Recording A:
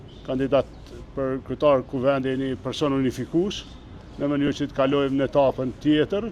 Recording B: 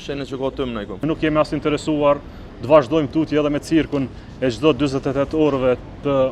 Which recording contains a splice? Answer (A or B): B